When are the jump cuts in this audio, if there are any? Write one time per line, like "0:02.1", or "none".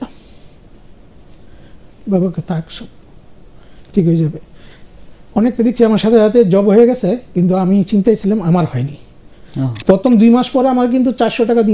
0:09.8